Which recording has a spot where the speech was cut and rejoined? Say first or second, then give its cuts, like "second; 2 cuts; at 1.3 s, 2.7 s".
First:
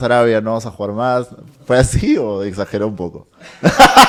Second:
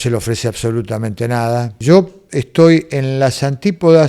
second; 1 cut; at 1.8 s